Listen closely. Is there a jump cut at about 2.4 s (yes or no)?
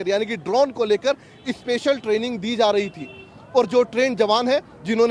no